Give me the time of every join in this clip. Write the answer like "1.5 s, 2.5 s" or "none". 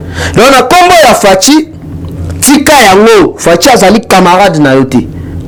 none